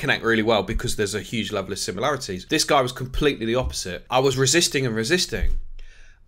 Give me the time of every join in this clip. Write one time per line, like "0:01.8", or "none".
0:02.3
0:04.3